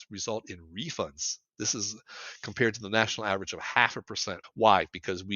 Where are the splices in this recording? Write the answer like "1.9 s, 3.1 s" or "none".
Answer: 4.4 s